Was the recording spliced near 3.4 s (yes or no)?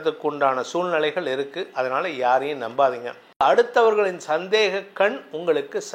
yes